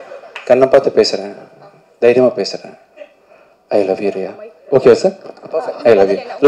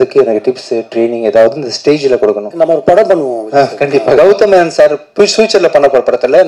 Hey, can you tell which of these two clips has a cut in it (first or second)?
second